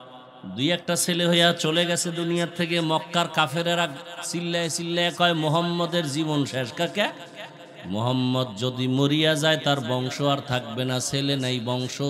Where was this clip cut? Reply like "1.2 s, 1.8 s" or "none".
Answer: none